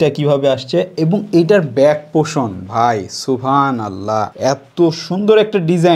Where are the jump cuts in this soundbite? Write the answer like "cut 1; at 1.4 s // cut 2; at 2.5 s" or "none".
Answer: none